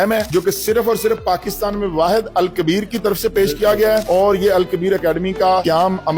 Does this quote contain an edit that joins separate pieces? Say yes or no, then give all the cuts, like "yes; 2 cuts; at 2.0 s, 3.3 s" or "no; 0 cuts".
no; 0 cuts